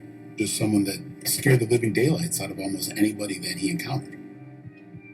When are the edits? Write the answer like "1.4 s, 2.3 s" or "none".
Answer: 3.2 s